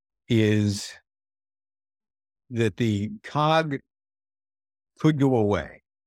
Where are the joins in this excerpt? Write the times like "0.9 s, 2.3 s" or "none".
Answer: none